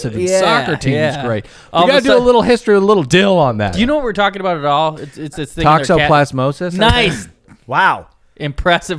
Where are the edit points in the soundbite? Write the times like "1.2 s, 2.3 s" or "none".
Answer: 3.7 s